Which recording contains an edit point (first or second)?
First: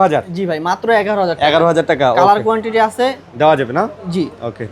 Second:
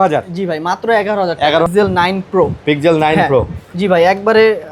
second